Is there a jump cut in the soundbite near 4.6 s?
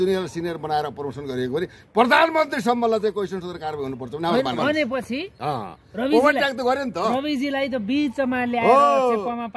yes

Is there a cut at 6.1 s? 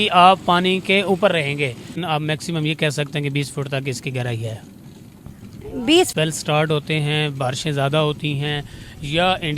yes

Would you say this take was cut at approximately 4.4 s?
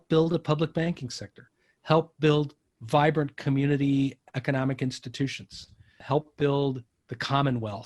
no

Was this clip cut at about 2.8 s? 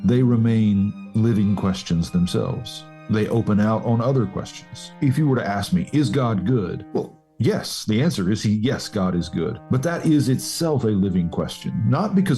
no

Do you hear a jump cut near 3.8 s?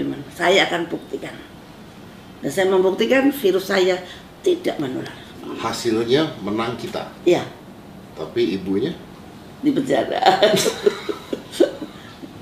no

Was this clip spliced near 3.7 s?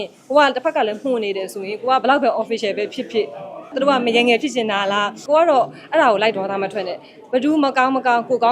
yes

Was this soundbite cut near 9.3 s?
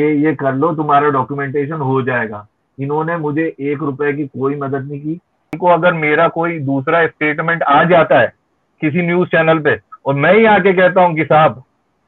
no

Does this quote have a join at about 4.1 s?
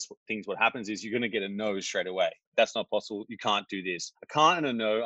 yes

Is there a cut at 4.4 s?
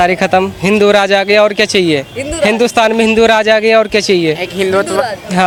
no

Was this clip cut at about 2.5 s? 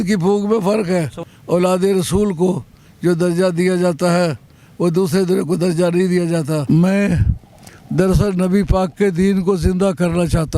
no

